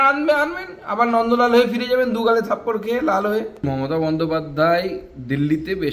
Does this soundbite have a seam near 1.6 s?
no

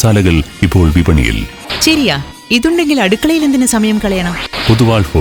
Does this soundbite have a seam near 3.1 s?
no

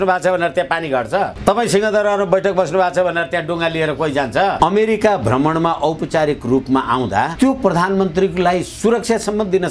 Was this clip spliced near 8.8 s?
no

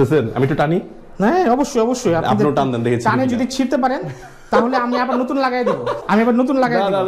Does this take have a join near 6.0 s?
yes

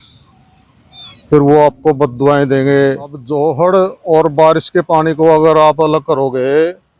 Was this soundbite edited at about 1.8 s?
no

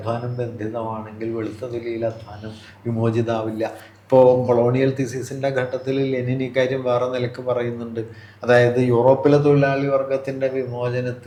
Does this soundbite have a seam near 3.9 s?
no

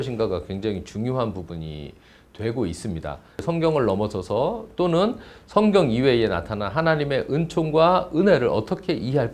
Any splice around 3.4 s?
yes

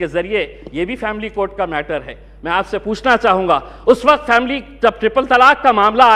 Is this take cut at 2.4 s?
no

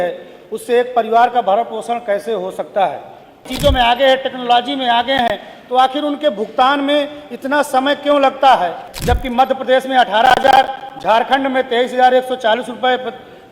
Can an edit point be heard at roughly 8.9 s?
yes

